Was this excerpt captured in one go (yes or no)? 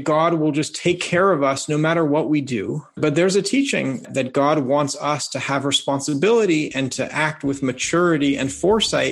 no